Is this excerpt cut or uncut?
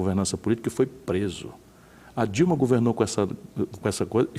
uncut